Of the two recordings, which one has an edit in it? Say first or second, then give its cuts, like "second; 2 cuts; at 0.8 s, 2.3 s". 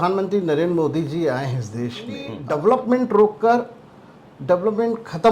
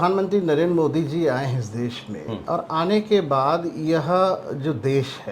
first; 1 cut; at 2.3 s